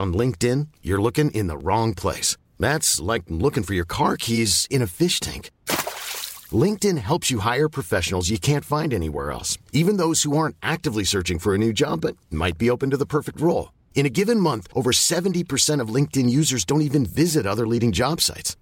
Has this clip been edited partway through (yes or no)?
no